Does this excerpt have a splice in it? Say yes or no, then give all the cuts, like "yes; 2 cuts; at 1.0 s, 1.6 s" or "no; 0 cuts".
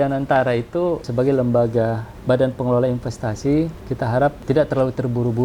yes; 3 cuts; at 1.1 s, 2.1 s, 4.2 s